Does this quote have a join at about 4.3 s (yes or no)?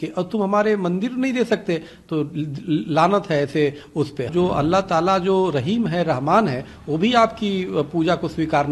yes